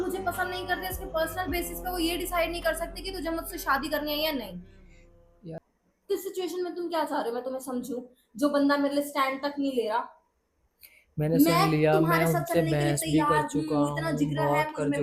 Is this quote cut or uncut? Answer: cut